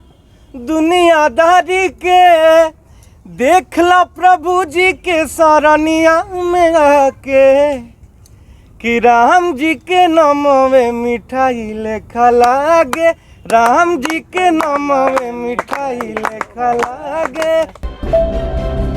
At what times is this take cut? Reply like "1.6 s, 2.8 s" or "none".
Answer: 17.9 s